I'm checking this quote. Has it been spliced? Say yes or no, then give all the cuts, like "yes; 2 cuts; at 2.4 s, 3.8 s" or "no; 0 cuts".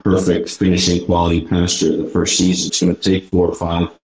yes; 1 cut; at 2.7 s